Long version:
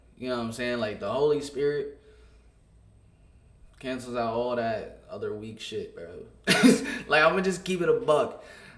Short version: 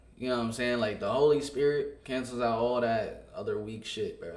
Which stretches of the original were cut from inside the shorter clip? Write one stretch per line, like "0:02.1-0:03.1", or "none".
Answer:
0:02.0-0:03.7